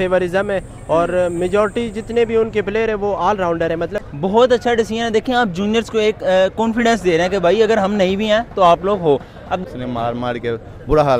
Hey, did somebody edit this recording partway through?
yes; 2 cuts; at 4.0 s, 9.6 s

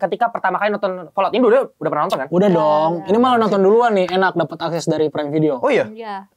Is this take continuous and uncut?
yes; 0 cuts

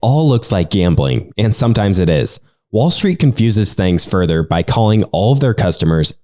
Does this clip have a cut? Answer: no; 0 cuts

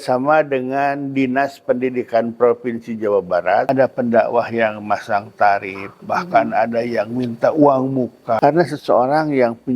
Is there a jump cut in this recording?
yes; 2 cuts; at 3.7 s, 8.4 s

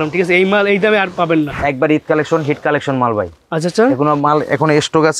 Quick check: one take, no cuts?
no; 1 cut; at 1.5 s

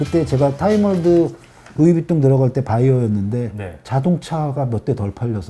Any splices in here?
no; 0 cuts

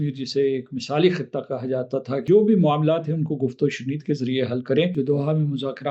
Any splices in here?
yes; 2 cuts; at 2.2 s, 4.9 s

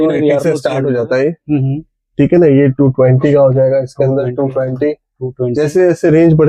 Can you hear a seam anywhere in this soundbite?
no; 0 cuts

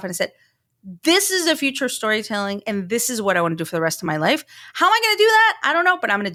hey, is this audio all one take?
yes; 0 cuts

